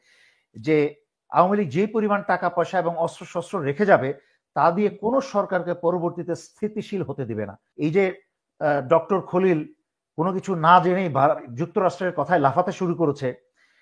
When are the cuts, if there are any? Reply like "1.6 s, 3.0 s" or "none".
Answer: 7.6 s